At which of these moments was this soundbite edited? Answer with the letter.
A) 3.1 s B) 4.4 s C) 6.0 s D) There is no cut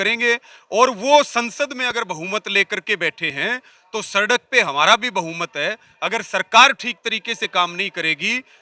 D